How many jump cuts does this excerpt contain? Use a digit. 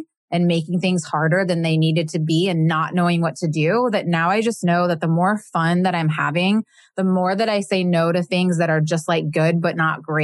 0